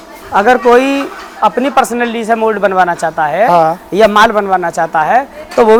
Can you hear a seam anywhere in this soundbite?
no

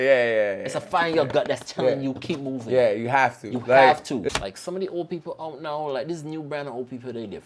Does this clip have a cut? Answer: yes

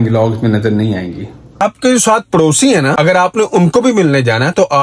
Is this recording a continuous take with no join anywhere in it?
no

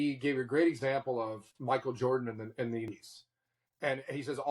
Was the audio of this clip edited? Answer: yes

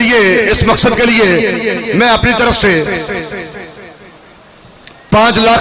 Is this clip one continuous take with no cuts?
yes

